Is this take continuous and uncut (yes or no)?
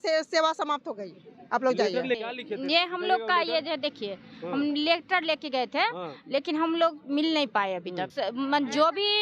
no